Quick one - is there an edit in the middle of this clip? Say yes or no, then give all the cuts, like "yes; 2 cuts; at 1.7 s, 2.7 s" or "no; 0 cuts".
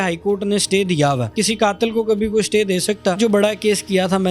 yes; 2 cuts; at 1.3 s, 3.2 s